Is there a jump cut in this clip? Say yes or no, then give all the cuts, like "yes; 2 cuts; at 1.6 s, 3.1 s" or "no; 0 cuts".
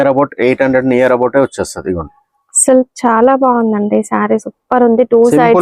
no; 0 cuts